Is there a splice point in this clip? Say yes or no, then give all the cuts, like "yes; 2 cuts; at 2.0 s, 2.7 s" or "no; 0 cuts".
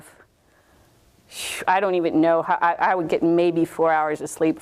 no; 0 cuts